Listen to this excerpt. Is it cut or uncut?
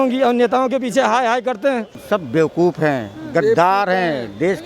cut